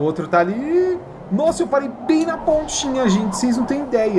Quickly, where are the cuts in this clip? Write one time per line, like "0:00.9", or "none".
none